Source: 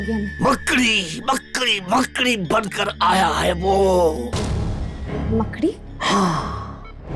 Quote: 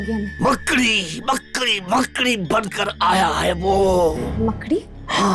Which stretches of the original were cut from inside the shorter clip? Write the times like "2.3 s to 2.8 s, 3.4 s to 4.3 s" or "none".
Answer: 4.2 s to 5.2 s